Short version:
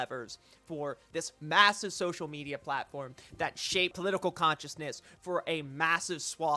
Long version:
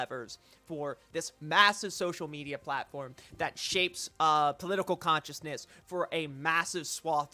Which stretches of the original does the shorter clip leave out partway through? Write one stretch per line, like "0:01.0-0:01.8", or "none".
0:04.0-0:04.6